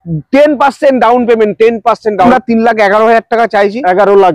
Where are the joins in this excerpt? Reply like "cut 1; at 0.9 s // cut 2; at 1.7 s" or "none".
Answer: cut 1; at 2.3 s